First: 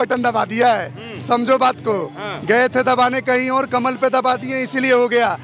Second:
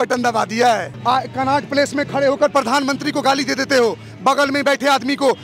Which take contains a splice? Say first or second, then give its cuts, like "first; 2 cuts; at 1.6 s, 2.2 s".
second; 1 cut; at 0.9 s